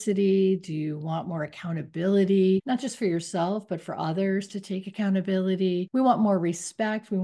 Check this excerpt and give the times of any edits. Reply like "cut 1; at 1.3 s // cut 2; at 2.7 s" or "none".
cut 1; at 2.6 s // cut 2; at 5.9 s